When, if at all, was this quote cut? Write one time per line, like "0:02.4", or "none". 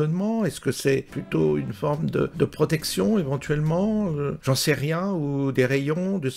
0:01.2
0:02.3
0:04.4